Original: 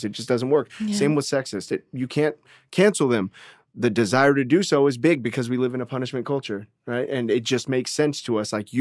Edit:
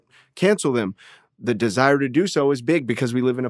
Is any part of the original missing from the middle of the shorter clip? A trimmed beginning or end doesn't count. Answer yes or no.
no